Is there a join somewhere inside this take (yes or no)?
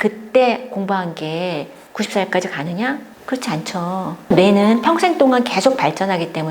yes